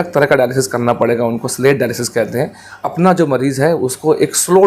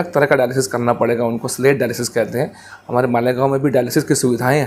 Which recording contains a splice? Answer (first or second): first